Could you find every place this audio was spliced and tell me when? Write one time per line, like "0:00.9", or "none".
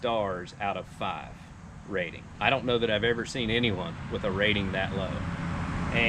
0:02.3